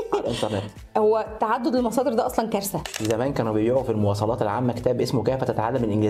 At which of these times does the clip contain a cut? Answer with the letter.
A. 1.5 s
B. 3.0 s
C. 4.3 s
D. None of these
B